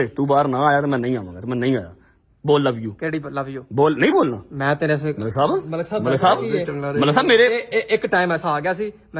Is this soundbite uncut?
yes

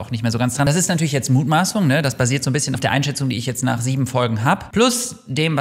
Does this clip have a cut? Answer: no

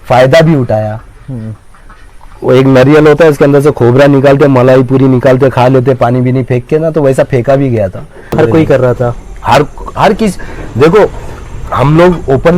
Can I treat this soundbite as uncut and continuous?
no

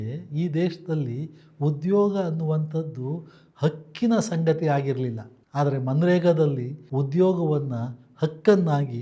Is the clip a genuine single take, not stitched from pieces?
yes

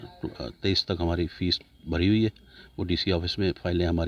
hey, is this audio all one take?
yes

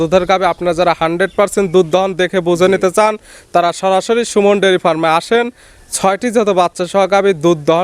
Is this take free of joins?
yes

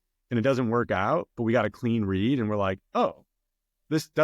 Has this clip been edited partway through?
no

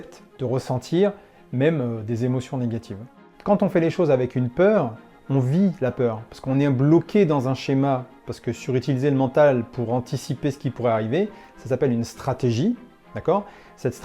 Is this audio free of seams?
no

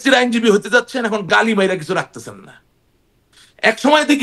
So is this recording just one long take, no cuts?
yes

